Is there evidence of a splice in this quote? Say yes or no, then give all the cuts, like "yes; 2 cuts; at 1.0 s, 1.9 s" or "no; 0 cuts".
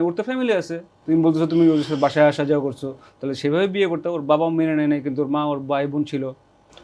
no; 0 cuts